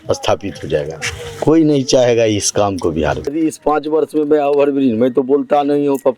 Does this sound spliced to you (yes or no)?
yes